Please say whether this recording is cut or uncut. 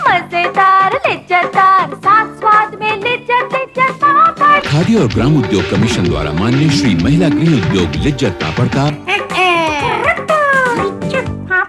uncut